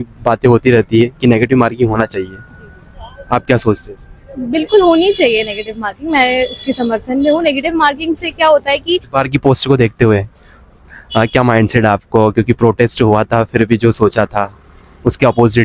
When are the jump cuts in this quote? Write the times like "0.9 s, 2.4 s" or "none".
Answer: 9.1 s